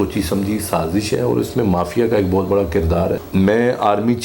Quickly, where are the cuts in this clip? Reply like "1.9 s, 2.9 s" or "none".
3.2 s